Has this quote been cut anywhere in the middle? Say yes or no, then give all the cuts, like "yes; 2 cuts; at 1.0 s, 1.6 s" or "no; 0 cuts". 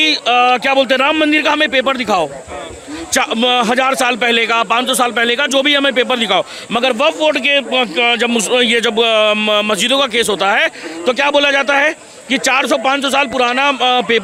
no; 0 cuts